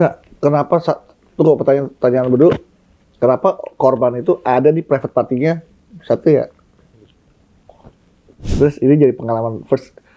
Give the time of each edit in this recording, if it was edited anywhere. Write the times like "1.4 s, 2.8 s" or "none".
8.3 s